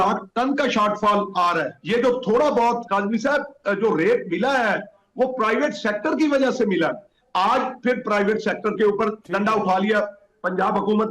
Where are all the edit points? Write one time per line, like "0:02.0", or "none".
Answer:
0:01.7